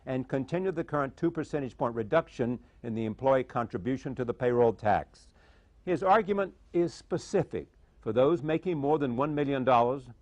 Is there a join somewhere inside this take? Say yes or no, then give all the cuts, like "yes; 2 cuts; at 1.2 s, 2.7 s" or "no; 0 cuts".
yes; 1 cut; at 2.6 s